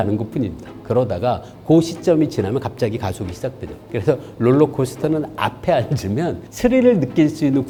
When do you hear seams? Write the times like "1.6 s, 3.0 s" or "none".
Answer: none